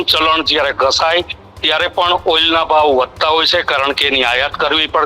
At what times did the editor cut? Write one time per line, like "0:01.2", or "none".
none